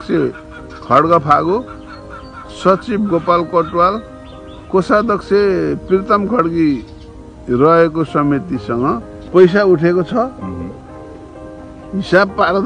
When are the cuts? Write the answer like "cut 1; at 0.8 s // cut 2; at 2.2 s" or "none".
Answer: cut 1; at 9.1 s